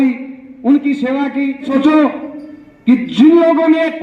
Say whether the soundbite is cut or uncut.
cut